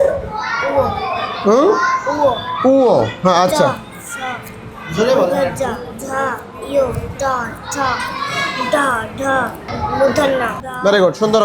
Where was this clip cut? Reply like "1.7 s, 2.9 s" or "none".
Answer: 9.7 s